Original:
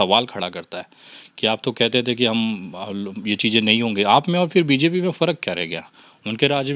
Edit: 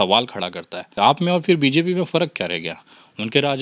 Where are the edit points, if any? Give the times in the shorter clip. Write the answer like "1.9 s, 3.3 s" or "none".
1.0 s